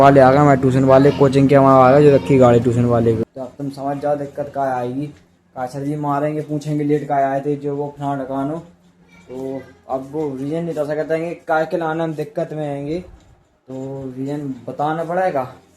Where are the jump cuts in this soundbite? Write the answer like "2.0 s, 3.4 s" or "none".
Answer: 3.3 s